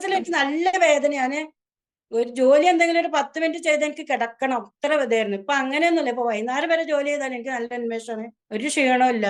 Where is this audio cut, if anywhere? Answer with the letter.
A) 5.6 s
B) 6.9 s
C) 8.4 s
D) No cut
C